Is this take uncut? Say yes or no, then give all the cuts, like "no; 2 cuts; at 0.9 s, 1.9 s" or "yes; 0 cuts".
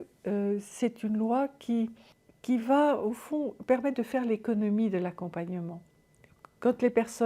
yes; 0 cuts